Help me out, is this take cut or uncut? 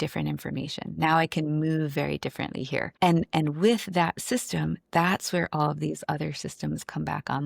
cut